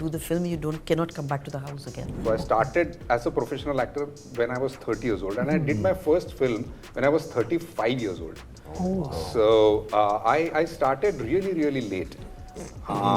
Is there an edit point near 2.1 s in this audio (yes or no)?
yes